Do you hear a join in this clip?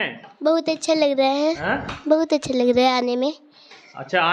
no; 0 cuts

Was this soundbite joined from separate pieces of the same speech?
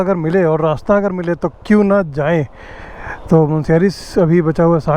no; 0 cuts

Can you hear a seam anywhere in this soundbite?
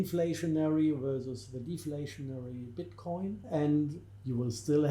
yes; 1 cut; at 3.4 s

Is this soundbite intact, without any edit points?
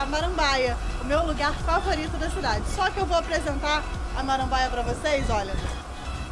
yes; 0 cuts

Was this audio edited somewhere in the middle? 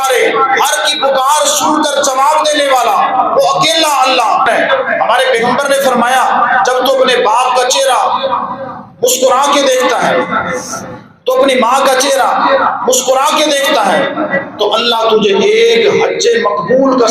yes; 1 cut; at 4.5 s

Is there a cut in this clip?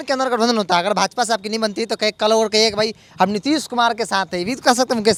no; 0 cuts

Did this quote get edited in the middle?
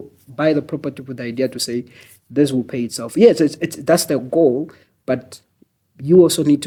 no; 0 cuts

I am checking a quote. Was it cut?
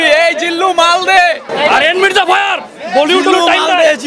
yes; 1 cut; at 1.5 s

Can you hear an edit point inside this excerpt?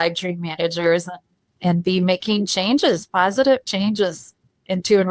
no; 0 cuts

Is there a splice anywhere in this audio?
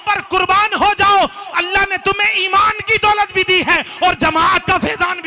no; 0 cuts

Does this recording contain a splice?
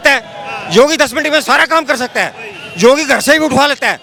no; 0 cuts

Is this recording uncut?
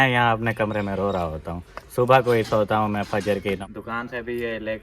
no; 1 cut; at 3.6 s

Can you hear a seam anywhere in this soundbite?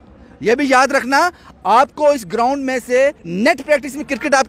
yes; 1 cut; at 3.2 s

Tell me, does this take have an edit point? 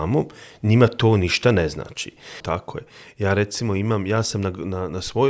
yes; 1 cut; at 2.4 s

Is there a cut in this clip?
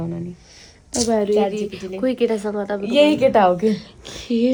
no; 0 cuts

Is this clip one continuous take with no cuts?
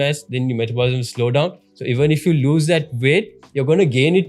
yes; 0 cuts

